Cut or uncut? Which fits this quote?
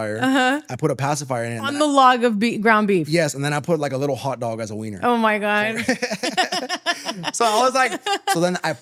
uncut